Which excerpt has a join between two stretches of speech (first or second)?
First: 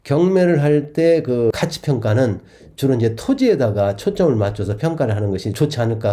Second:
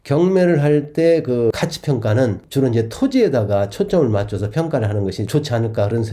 second